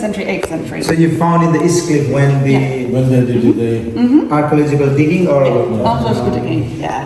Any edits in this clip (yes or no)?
no